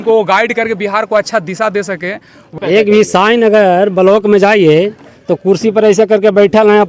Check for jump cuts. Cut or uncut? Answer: cut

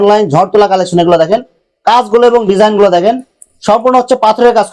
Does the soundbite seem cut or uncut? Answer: uncut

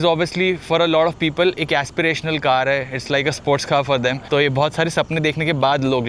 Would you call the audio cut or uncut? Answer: cut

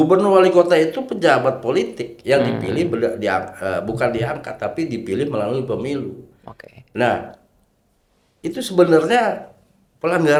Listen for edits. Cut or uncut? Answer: uncut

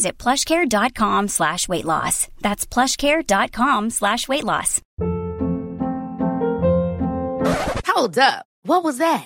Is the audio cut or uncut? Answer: cut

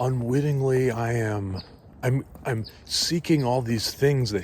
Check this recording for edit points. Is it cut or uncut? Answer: cut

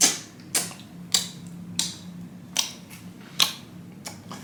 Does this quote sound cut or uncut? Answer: uncut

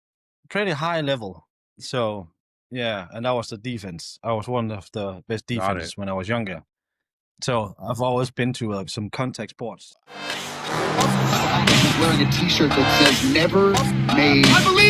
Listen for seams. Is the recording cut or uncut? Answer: cut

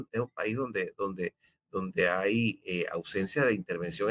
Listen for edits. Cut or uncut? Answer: uncut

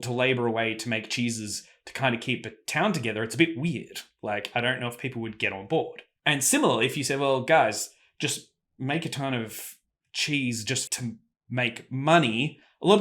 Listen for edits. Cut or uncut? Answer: cut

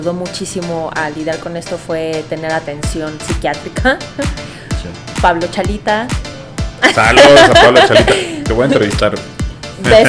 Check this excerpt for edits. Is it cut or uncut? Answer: uncut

